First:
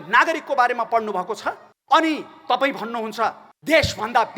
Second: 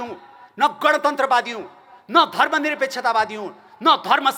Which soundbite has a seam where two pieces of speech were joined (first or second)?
first